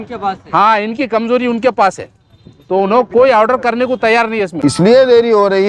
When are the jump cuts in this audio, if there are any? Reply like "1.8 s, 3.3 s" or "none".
4.5 s